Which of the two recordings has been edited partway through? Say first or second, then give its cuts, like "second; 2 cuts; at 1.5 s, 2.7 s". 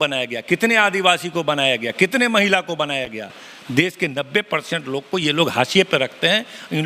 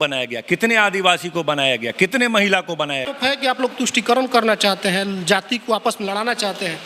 second; 1 cut; at 3.1 s